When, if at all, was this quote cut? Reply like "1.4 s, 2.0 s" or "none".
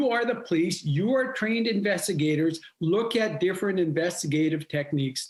none